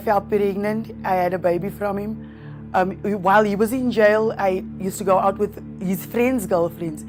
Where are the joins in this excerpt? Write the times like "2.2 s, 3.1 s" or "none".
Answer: none